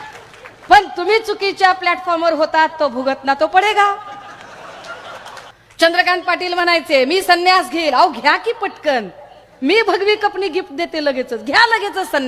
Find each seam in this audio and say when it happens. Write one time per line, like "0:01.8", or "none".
0:05.5